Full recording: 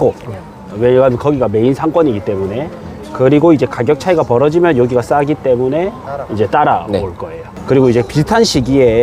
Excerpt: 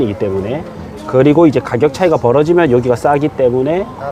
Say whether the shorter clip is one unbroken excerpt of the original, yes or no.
yes